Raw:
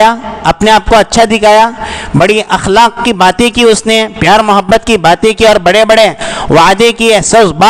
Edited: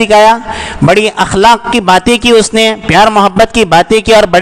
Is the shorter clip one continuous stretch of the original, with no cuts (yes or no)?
yes